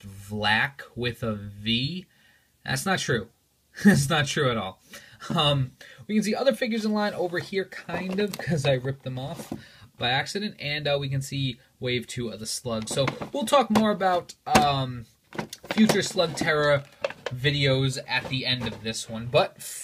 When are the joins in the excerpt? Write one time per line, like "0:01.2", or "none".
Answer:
0:14.0